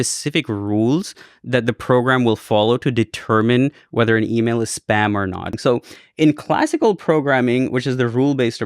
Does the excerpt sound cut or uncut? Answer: cut